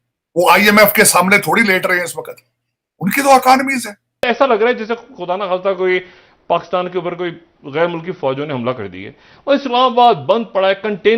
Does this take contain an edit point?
yes; 1 cut; at 4.3 s

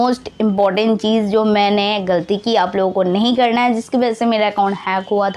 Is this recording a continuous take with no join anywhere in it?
yes; 0 cuts

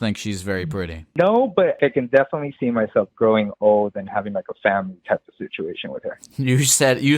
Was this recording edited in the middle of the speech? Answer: yes; 2 cuts; at 1.0 s, 1.8 s

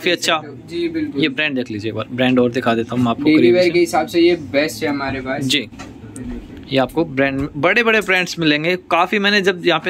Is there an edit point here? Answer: no; 0 cuts

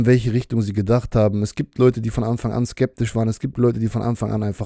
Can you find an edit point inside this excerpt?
no; 0 cuts

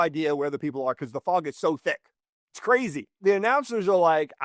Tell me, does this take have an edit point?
yes; 1 cut; at 3.2 s

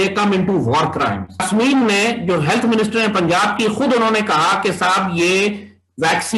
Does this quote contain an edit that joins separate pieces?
yes; 1 cut; at 1.4 s

